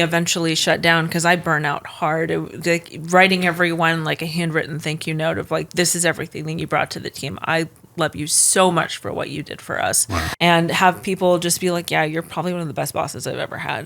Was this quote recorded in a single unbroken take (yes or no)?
no